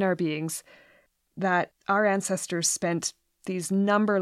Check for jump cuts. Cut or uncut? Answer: cut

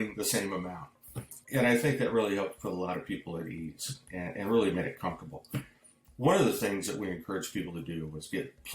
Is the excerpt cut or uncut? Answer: cut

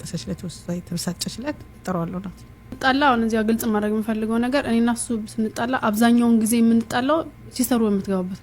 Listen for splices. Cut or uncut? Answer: cut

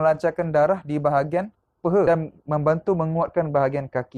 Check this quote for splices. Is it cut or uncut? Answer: cut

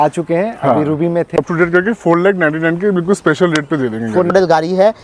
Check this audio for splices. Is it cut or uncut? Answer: cut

